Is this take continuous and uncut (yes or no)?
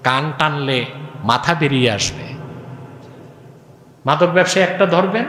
yes